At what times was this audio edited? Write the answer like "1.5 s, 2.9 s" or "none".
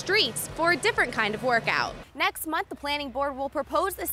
2.0 s

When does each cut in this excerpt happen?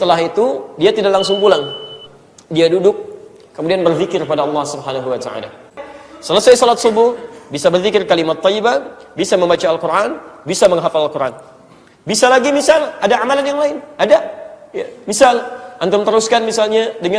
5.8 s

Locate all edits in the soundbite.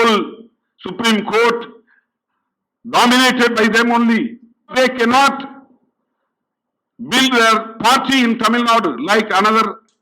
4.7 s

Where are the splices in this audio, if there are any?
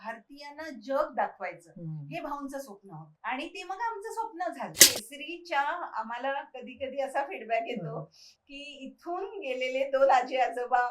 3.1 s, 4.8 s

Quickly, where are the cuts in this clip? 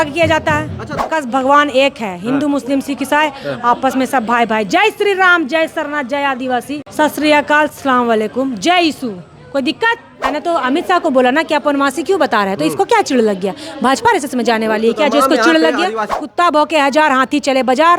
1.0 s, 6.9 s, 10.3 s, 16.1 s

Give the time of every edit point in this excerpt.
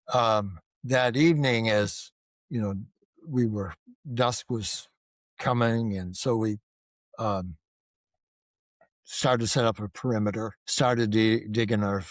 10.6 s

